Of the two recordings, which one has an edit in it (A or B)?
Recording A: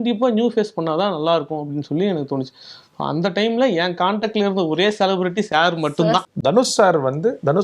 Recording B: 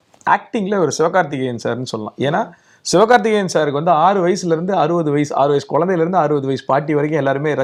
A